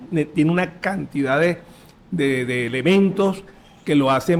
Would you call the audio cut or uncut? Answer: uncut